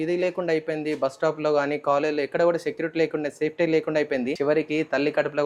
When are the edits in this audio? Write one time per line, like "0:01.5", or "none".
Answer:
0:04.3

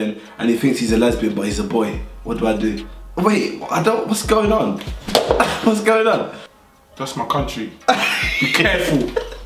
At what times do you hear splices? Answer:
none

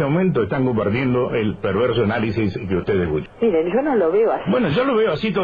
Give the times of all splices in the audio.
none

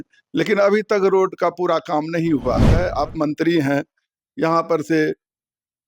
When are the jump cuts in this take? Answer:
0:02.8

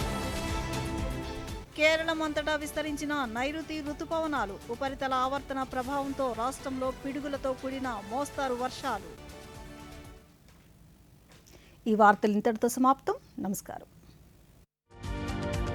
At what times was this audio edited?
none

